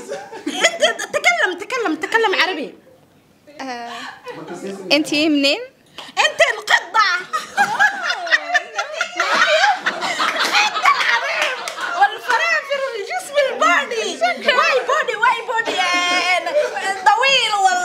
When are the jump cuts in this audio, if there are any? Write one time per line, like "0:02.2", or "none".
none

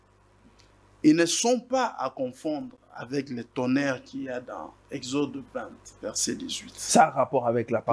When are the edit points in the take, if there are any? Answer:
none

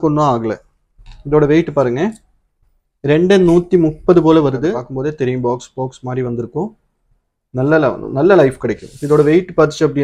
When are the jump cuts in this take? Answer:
0:04.9

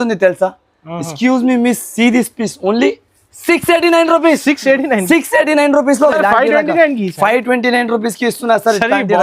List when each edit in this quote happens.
0:06.2

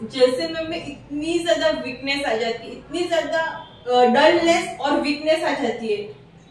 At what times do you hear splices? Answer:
0:03.7

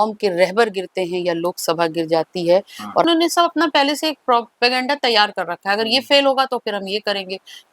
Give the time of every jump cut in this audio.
0:03.1

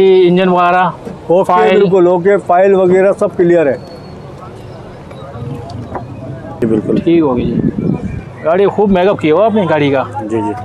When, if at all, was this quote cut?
0:06.6

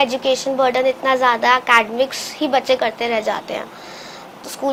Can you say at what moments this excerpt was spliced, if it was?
none

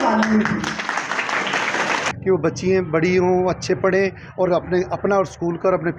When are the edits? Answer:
0:02.1

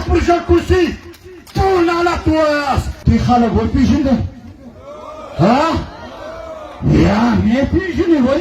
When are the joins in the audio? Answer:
0:02.9

